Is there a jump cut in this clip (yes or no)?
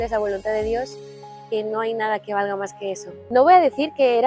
yes